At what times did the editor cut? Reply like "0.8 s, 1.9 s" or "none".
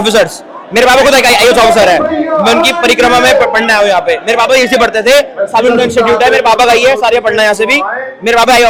none